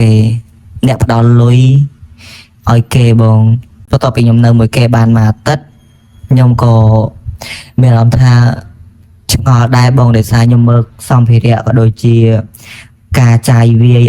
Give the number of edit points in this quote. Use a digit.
1